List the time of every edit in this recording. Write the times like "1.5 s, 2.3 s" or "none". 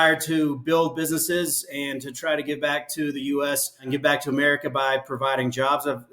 3.9 s